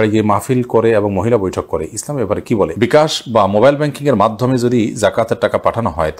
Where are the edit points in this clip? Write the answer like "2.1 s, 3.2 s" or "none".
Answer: 2.7 s